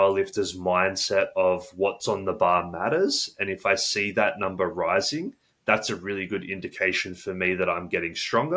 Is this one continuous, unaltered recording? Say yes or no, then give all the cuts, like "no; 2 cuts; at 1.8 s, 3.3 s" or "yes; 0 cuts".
yes; 0 cuts